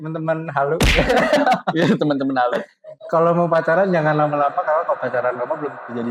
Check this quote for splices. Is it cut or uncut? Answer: uncut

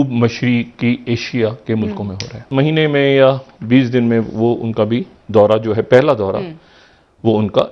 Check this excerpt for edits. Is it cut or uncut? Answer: cut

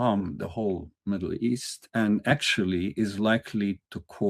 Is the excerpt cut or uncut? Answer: cut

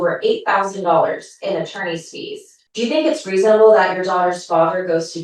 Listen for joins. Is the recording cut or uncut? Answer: cut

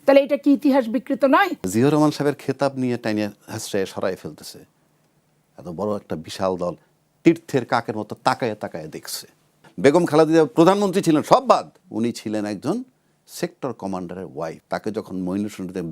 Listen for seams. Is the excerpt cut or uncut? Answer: cut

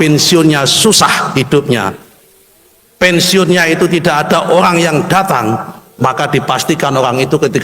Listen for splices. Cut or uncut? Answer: uncut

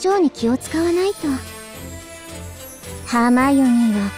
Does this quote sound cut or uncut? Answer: cut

